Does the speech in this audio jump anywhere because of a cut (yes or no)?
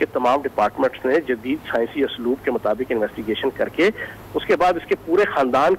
no